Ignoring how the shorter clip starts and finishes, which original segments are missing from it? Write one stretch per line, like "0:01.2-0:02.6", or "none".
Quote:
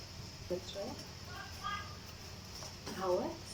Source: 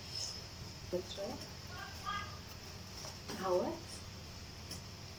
none